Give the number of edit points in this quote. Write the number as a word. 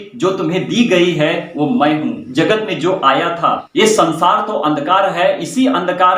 two